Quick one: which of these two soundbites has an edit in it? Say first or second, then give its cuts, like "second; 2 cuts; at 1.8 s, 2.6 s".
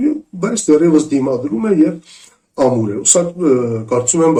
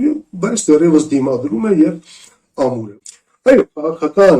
second; 1 cut; at 2.8 s